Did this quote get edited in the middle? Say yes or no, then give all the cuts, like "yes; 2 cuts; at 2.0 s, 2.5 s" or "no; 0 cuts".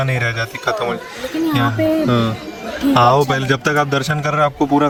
no; 0 cuts